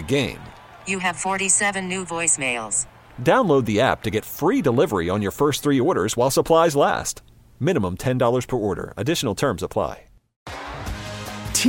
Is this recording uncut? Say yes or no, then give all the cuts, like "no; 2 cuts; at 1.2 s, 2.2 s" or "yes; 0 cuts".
no; 1 cut; at 10.4 s